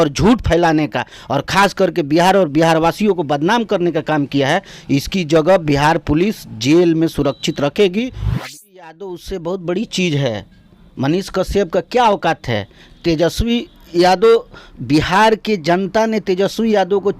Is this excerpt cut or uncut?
cut